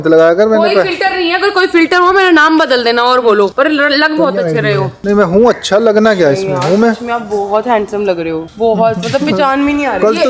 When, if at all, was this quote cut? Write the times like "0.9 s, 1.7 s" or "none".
none

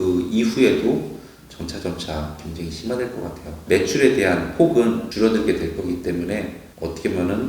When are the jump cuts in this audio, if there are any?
3.6 s

